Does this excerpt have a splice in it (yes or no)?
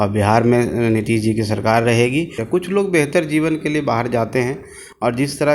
yes